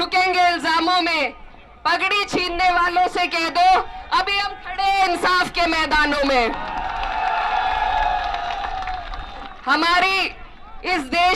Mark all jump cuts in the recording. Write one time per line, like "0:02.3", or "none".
none